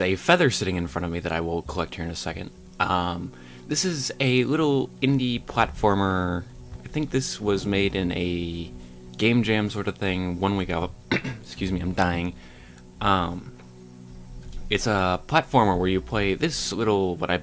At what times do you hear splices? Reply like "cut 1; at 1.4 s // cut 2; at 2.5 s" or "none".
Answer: none